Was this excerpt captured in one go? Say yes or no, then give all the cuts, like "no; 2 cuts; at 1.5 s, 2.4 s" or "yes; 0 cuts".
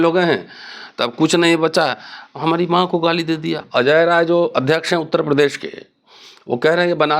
no; 1 cut; at 3.6 s